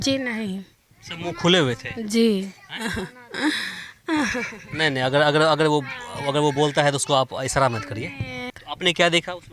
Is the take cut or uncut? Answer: cut